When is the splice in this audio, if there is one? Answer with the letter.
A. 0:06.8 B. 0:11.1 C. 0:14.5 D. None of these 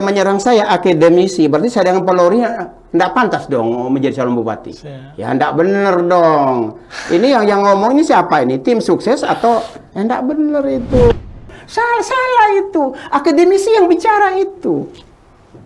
B